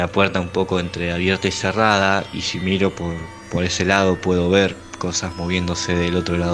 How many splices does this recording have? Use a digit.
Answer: 0